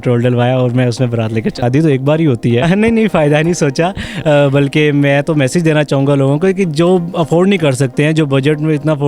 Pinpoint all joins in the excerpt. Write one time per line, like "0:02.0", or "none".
0:01.6
0:02.6